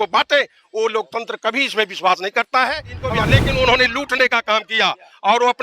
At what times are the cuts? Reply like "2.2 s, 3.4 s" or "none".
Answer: 3.1 s